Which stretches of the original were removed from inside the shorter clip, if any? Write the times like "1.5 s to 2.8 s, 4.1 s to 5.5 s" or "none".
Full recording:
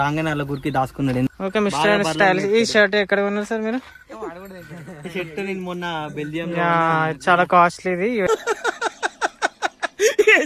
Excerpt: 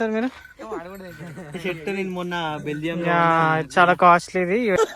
none